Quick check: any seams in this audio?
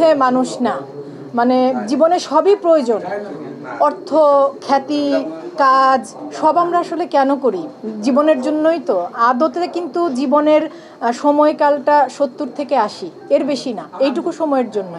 no; 0 cuts

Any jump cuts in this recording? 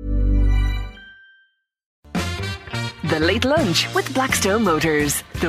yes; 1 cut; at 1.9 s

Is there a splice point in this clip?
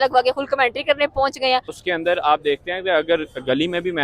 yes; 1 cut; at 1.8 s

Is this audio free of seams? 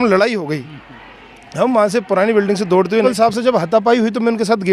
no; 1 cut; at 3.0 s

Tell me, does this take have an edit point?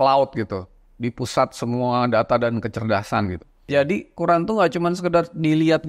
yes; 1 cut; at 3.6 s

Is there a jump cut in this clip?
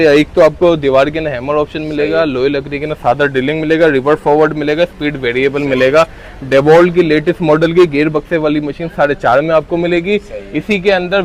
no; 0 cuts

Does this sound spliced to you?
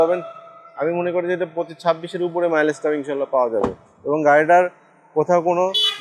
no; 0 cuts

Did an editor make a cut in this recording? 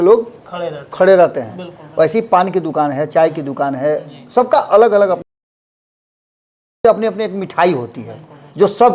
no; 0 cuts

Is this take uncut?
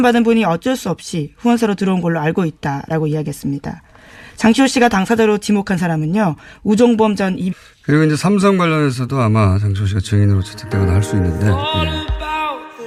yes; 0 cuts

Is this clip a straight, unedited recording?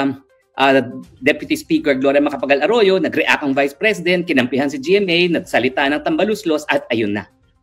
yes; 0 cuts

